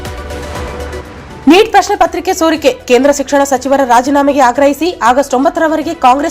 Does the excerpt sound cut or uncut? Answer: cut